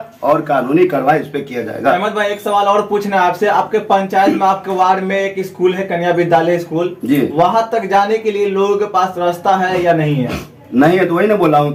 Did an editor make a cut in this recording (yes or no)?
no